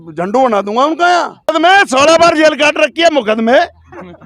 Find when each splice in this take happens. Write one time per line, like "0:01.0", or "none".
0:01.5